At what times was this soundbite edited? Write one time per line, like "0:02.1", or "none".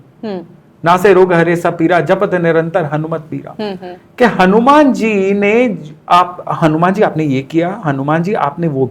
none